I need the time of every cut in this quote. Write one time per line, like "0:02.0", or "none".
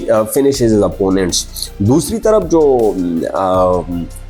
none